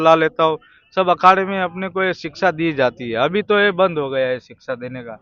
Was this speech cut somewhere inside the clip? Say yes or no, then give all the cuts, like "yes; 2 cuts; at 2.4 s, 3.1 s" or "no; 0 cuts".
no; 0 cuts